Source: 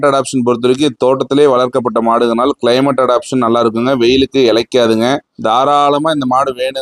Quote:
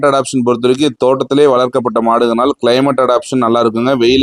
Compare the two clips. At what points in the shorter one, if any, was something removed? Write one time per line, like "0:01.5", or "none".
none

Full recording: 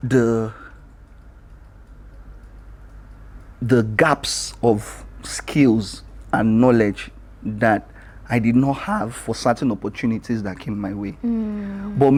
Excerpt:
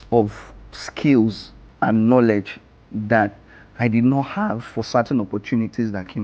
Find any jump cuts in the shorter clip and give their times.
none

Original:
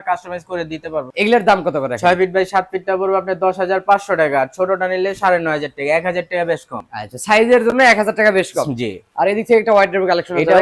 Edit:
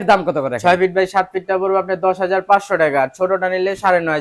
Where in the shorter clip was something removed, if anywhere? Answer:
none

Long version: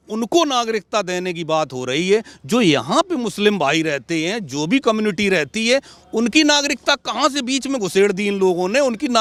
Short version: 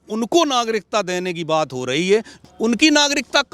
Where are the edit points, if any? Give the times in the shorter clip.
0:02.4

